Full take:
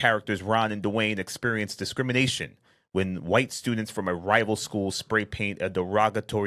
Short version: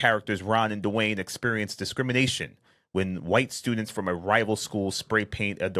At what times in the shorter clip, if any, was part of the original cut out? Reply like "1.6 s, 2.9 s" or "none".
none